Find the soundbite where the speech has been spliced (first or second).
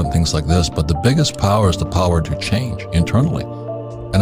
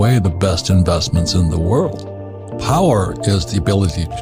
second